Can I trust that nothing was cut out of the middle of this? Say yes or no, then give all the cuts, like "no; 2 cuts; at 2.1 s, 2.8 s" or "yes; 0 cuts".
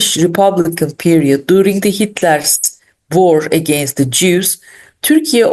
yes; 0 cuts